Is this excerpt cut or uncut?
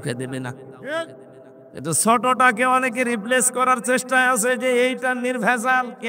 uncut